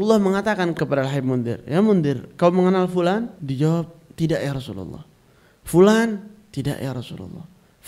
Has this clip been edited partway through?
yes; 2 cuts; at 0.8 s, 3.4 s

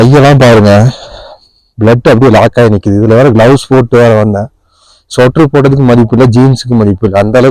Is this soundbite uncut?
yes; 0 cuts

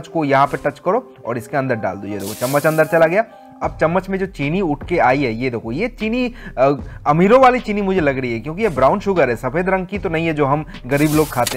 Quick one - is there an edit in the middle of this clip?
no; 0 cuts

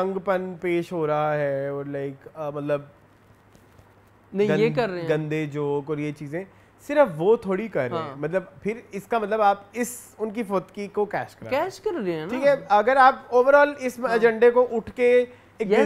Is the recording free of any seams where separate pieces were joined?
yes; 0 cuts

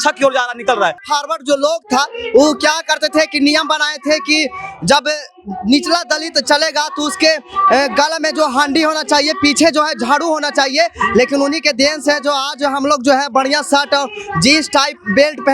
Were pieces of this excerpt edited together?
yes; 1 cut; at 1.0 s

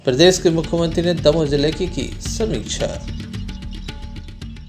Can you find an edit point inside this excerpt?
yes; 1 cut; at 3.0 s

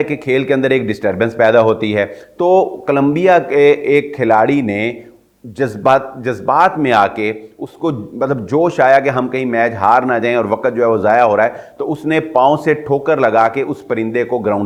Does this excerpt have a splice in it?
no; 0 cuts

